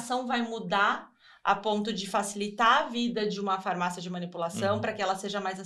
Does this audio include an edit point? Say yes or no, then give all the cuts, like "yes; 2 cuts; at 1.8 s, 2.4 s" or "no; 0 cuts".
no; 0 cuts